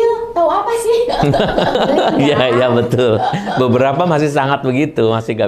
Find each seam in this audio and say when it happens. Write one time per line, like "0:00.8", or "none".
0:01.7